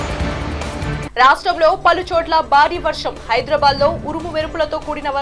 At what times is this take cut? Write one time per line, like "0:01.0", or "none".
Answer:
0:01.0